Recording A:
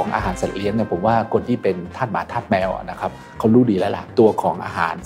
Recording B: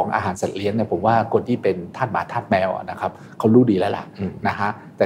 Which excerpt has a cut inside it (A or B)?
A